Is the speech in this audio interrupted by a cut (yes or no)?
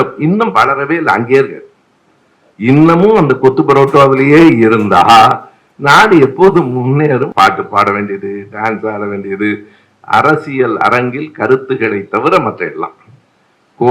yes